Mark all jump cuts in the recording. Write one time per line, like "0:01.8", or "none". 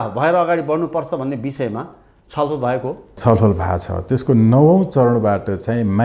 0:03.2